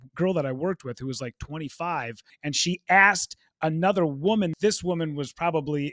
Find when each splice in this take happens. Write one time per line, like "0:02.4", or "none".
0:02.3
0:04.5